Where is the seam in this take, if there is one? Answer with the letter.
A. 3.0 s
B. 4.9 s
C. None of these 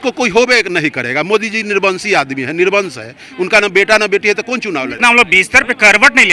B